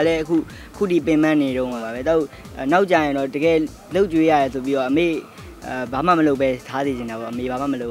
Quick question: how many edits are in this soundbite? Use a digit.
1